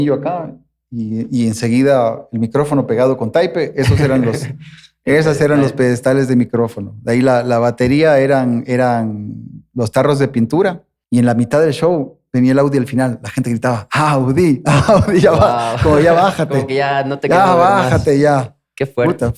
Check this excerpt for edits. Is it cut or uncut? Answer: cut